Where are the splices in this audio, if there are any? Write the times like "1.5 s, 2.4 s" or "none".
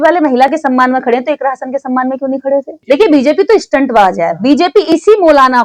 2.7 s

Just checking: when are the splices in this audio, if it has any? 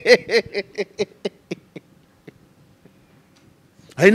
none

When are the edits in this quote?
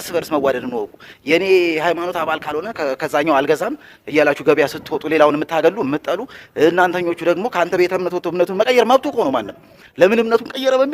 none

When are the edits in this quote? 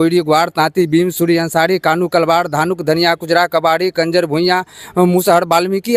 none

